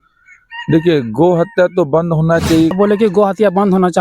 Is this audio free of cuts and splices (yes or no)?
no